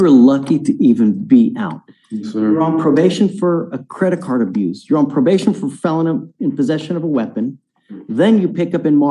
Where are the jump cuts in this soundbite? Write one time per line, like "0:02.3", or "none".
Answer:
none